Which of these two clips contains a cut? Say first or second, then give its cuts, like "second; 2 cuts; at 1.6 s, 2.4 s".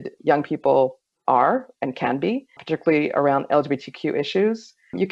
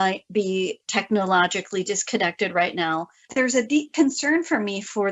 second; 1 cut; at 3.3 s